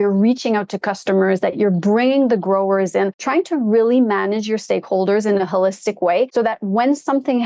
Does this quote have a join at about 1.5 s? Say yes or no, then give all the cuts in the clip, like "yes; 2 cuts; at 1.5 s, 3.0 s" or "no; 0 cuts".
no; 2 cuts; at 3.2 s, 6.3 s